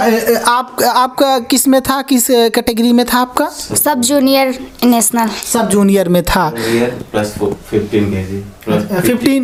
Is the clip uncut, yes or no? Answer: yes